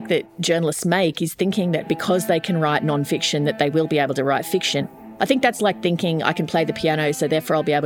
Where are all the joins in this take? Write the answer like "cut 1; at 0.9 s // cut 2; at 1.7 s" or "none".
cut 1; at 5.0 s